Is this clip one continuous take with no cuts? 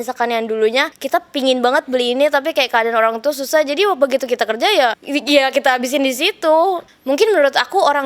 no; 3 cuts; at 1.0 s, 5.0 s, 6.9 s

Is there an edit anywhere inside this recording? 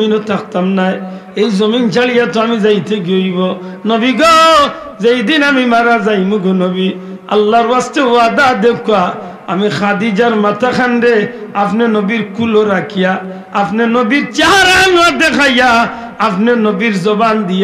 no; 0 cuts

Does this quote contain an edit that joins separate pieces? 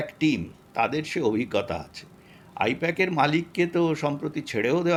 no; 0 cuts

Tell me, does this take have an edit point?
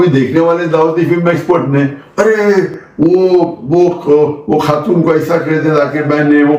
no; 0 cuts

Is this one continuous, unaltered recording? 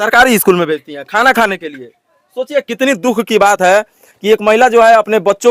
yes; 0 cuts

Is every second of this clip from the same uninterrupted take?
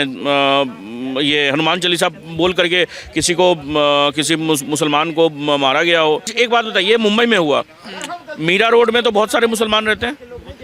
no; 1 cut; at 6.3 s

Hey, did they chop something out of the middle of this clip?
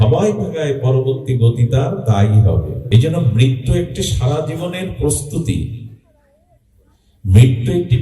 yes; 1 cut; at 2.8 s

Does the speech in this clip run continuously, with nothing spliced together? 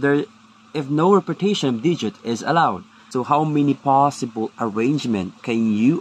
no; 1 cut; at 2.9 s

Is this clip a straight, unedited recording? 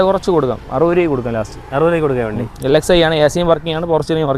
yes; 0 cuts

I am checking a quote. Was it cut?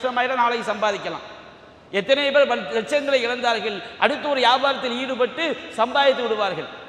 no; 0 cuts

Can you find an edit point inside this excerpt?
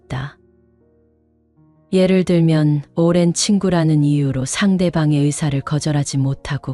no; 0 cuts

